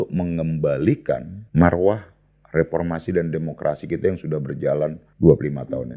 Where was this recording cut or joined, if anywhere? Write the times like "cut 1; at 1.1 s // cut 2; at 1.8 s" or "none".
cut 1; at 1.4 s // cut 2; at 5.0 s